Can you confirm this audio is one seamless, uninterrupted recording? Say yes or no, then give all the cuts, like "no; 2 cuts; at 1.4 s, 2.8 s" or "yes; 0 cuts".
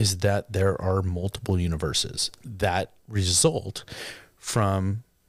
yes; 0 cuts